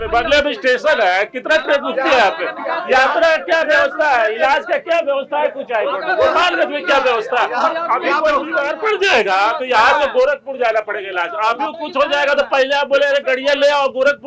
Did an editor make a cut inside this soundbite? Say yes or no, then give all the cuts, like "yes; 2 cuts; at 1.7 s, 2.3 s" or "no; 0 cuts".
no; 0 cuts